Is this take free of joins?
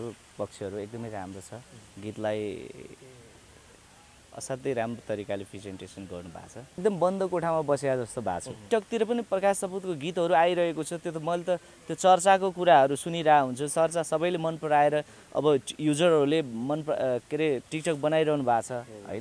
no; 2 cuts; at 6.8 s, 8.6 s

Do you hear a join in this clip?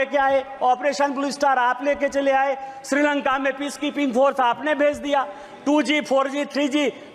no; 0 cuts

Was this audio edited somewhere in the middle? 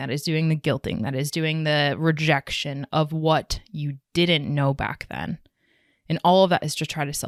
no; 0 cuts

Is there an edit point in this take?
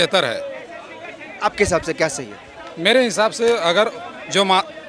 no; 0 cuts

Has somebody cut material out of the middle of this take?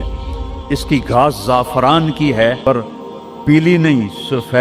yes; 1 cut; at 2.9 s

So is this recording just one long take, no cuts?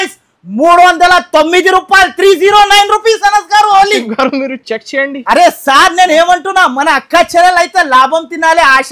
yes; 0 cuts

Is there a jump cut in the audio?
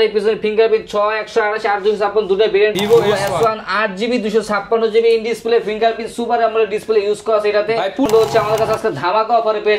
yes; 2 cuts; at 2.7 s, 8.1 s

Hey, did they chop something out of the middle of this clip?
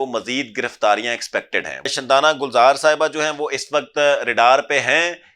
yes; 1 cut; at 1.9 s

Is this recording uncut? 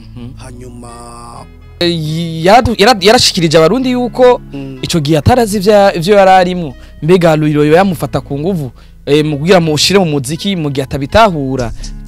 no; 1 cut; at 1.8 s

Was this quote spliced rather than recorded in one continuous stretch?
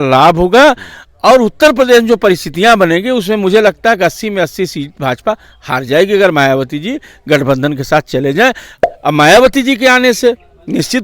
yes; 1 cut; at 8.7 s

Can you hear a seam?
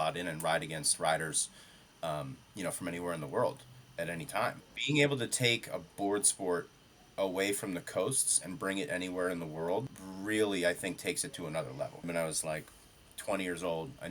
yes; 3 cuts; at 4.7 s, 10.0 s, 12.1 s

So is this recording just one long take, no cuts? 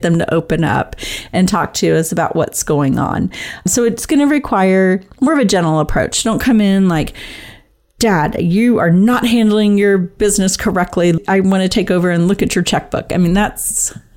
no; 2 cuts; at 3.7 s, 11.2 s

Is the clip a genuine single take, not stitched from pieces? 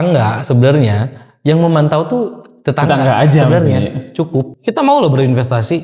no; 1 cut; at 4.5 s

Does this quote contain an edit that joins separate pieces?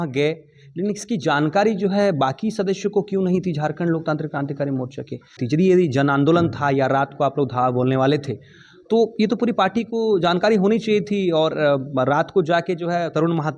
yes; 1 cut; at 5.4 s

